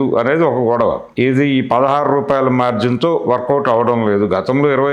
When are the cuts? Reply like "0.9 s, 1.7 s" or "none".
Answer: 1.1 s